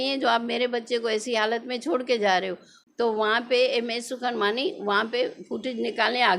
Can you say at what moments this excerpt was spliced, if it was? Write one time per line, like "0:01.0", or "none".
0:02.8